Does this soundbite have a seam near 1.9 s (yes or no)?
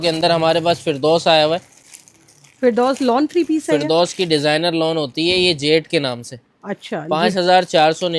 no